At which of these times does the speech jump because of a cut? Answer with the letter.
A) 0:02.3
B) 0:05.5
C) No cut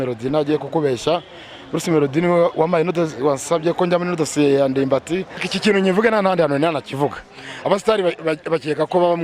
B